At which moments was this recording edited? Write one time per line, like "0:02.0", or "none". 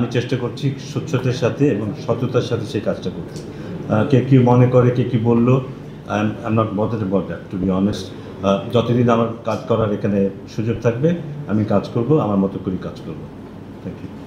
none